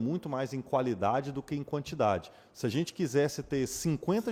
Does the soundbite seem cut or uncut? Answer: uncut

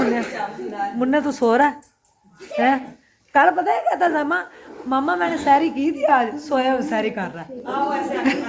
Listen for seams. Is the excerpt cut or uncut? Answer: uncut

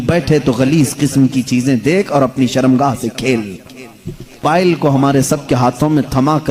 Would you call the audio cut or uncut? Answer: cut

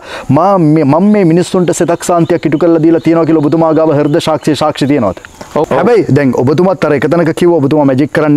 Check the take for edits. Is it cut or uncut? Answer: cut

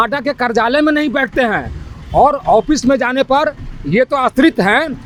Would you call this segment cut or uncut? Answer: uncut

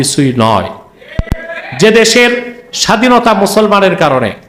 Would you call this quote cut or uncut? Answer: uncut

